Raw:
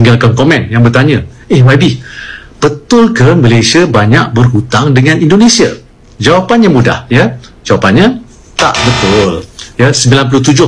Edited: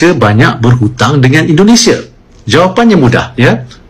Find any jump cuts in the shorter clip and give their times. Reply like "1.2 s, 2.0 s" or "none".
none